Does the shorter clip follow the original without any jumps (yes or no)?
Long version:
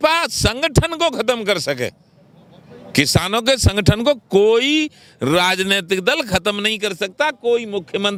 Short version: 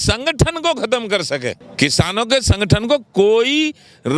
no